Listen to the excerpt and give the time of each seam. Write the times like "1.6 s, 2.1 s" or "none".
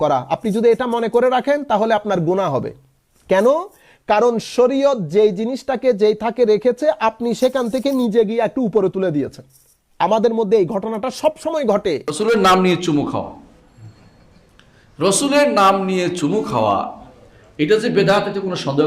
12.1 s

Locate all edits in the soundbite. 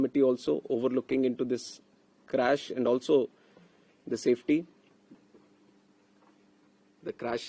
5.2 s

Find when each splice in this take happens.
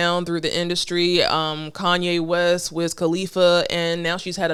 none

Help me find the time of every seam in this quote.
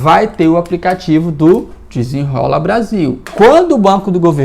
3.2 s

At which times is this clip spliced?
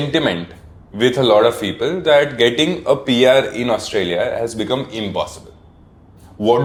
none

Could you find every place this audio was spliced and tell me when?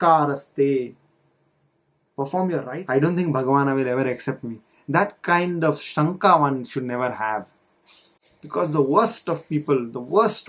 2.7 s

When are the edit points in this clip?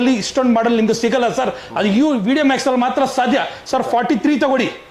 none

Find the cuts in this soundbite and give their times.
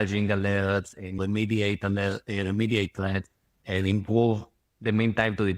1.2 s, 3.6 s

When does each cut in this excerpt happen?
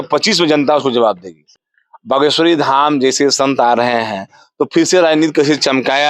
1.5 s

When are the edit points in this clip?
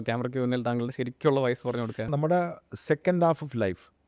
2.0 s

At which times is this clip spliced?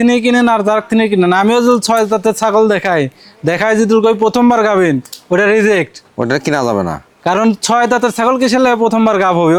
none

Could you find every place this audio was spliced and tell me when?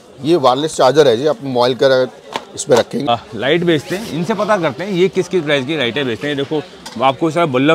3.1 s

